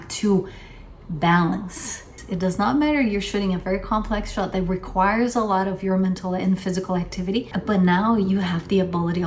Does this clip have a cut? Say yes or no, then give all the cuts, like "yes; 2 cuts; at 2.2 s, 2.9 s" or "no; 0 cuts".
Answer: yes; 2 cuts; at 2.2 s, 7.5 s